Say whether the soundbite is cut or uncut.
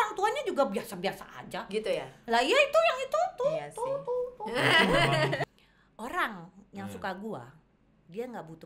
cut